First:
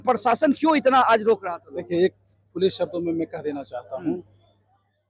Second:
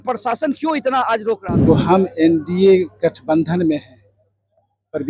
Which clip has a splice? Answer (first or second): second